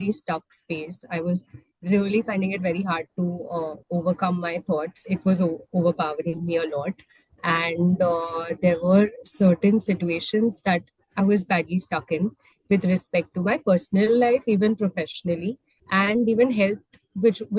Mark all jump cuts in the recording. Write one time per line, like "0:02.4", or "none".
none